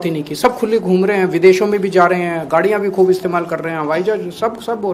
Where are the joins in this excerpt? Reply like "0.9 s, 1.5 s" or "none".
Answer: none